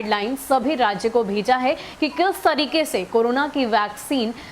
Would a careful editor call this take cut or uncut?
uncut